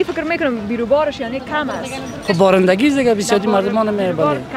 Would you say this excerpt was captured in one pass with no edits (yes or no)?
yes